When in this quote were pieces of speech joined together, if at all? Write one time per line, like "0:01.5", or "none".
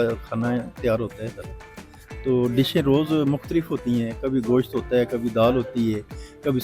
none